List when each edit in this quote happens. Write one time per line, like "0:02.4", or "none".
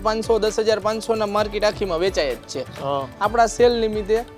0:03.1